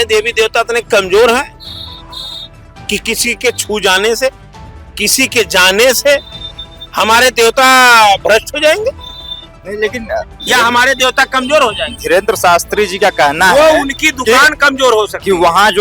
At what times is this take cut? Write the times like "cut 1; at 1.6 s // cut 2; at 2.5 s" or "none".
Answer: none